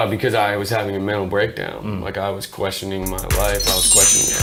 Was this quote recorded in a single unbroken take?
yes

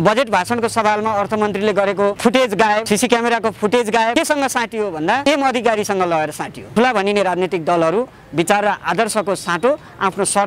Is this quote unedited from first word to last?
no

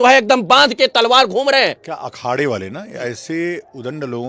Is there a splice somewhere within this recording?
yes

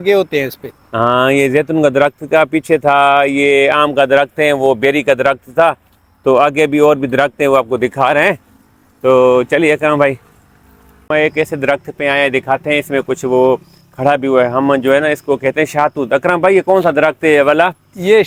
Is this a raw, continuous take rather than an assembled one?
yes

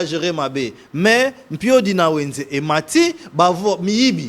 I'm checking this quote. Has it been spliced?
no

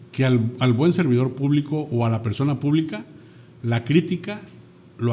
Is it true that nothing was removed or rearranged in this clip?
yes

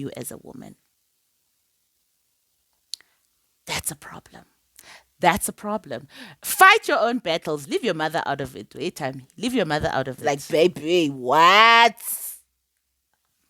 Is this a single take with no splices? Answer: no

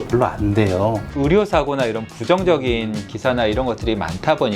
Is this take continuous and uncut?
no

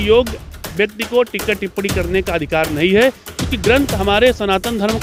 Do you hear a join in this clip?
no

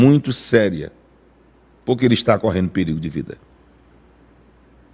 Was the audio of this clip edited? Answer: no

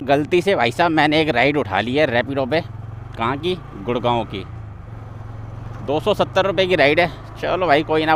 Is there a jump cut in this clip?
no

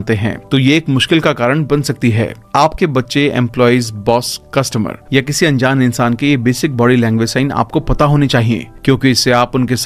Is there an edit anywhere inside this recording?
no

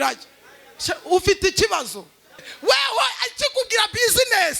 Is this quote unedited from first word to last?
no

